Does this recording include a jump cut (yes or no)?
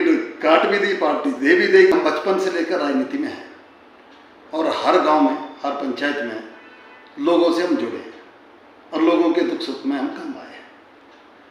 yes